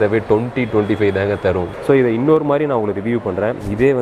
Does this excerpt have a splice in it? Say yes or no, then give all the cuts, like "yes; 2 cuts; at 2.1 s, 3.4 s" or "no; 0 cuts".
yes; 1 cut; at 1.7 s